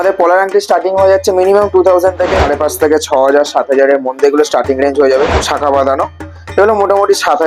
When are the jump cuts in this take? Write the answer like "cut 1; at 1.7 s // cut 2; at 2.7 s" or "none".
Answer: cut 1; at 2.4 s // cut 2; at 5.4 s